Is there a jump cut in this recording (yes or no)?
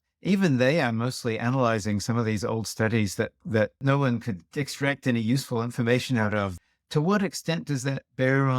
yes